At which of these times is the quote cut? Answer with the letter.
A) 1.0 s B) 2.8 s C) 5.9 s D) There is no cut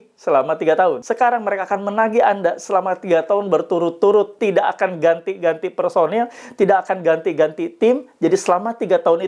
A